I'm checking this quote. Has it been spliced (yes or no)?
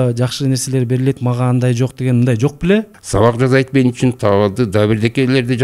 yes